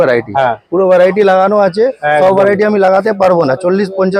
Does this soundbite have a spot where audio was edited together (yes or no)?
no